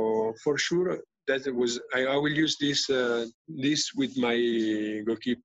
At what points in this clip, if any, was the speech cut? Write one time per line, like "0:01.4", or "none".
0:03.4